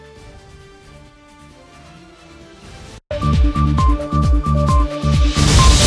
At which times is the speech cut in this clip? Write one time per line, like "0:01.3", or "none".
0:03.0